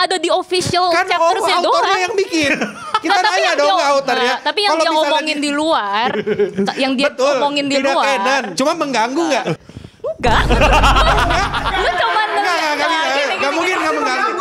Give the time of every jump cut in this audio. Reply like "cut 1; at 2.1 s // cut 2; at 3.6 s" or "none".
cut 1; at 8.5 s // cut 2; at 9.5 s